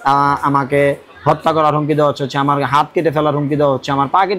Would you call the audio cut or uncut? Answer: uncut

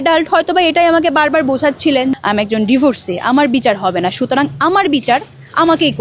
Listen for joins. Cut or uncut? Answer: cut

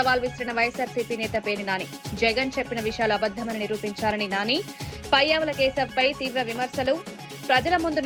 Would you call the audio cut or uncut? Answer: uncut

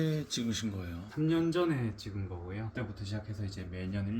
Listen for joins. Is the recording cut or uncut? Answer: cut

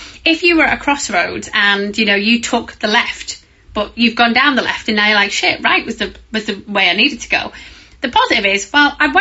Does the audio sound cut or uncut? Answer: uncut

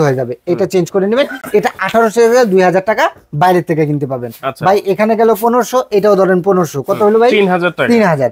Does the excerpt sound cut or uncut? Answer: uncut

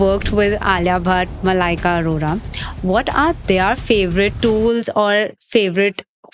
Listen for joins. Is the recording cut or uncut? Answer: uncut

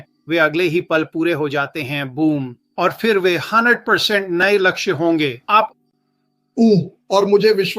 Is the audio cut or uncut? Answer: cut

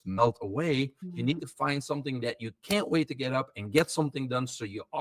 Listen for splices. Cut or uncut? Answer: cut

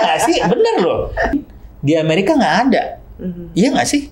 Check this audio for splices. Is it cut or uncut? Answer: cut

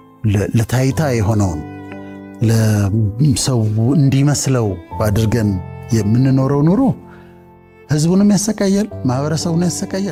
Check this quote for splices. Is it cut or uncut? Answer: uncut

